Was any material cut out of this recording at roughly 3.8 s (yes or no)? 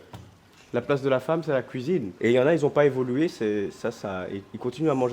no